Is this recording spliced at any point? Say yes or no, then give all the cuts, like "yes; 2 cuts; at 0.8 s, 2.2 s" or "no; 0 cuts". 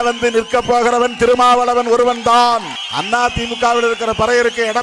yes; 1 cut; at 2.8 s